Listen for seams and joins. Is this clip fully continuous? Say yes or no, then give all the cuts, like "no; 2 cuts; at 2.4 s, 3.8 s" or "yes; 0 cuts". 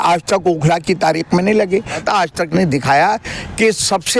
no; 1 cut; at 2.0 s